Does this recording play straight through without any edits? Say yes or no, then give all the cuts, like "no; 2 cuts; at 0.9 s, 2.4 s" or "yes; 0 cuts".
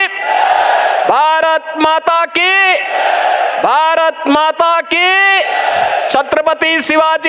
yes; 0 cuts